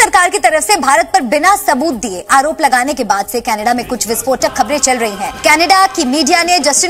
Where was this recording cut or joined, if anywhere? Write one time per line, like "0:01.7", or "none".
none

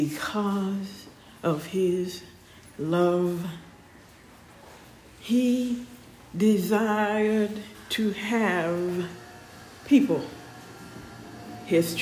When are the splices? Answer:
none

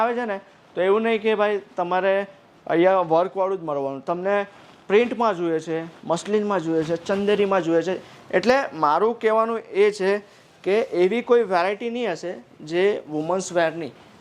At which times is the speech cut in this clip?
none

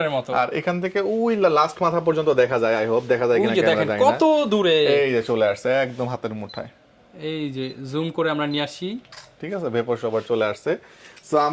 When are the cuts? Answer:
none

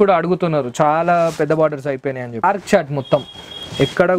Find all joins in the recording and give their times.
0:02.4

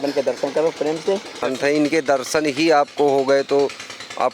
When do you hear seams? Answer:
0:01.4

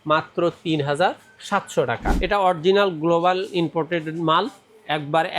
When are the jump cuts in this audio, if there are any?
0:02.1

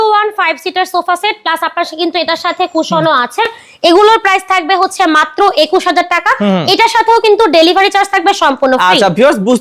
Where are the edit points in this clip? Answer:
none

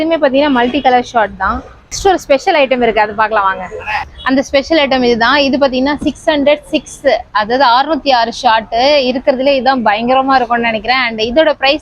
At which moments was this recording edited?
0:02.0

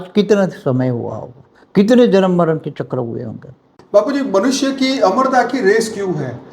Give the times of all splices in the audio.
0:03.7

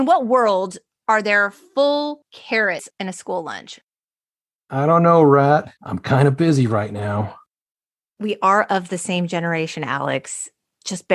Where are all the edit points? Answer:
0:04.1
0:07.7

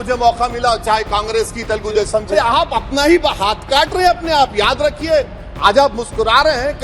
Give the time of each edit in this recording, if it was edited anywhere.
0:02.3

